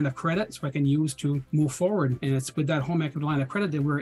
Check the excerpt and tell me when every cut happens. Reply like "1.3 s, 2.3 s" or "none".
1.4 s, 2.2 s